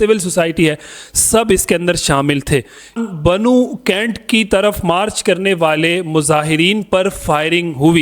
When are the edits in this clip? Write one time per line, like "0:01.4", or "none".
0:03.0